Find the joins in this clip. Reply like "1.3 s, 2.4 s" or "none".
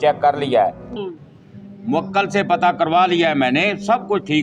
1.0 s